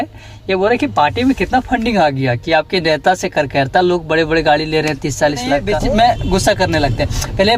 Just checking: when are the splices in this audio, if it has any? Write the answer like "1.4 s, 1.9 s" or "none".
5.7 s